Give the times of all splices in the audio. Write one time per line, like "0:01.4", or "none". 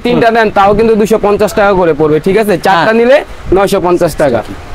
none